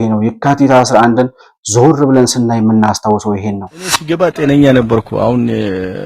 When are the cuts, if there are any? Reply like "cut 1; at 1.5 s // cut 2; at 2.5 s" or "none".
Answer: cut 1; at 4.0 s

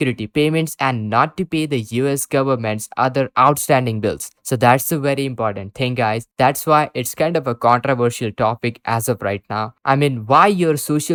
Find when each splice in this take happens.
none

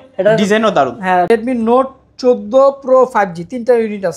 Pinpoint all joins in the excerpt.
cut 1; at 1.3 s

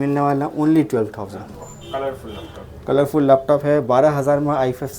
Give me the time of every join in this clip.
none

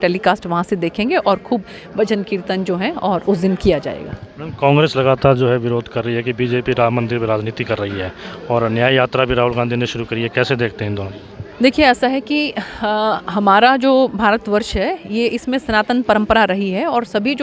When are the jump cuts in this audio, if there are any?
none

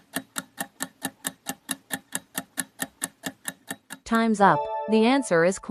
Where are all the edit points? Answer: cut 1; at 3.7 s // cut 2; at 4.9 s

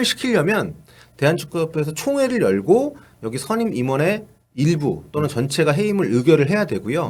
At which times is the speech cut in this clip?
none

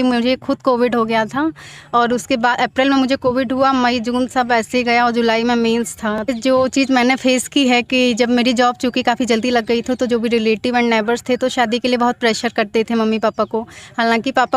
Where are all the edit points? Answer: cut 1; at 6.3 s

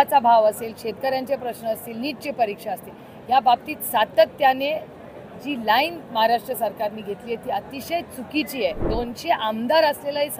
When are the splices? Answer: cut 1; at 8.9 s

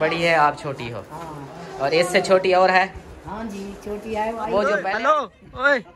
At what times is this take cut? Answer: cut 1; at 4.8 s

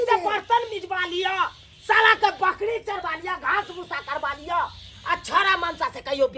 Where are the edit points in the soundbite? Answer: none

